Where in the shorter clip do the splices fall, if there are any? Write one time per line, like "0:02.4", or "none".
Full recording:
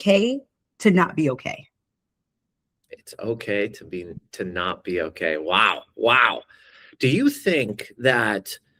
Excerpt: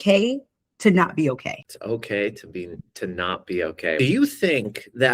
0:01.7
0:04.0